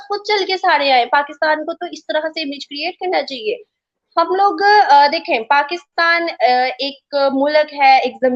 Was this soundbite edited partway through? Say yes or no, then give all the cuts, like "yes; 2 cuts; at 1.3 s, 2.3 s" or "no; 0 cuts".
no; 0 cuts